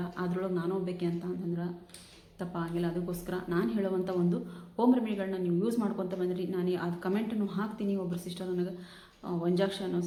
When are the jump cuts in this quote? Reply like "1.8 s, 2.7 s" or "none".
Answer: none